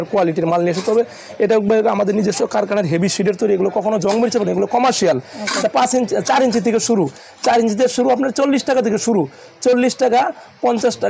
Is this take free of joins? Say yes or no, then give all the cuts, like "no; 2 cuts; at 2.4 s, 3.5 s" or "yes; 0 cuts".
yes; 0 cuts